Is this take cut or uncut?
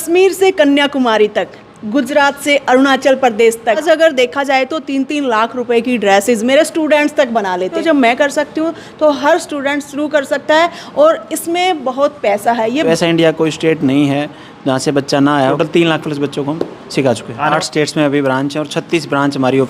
cut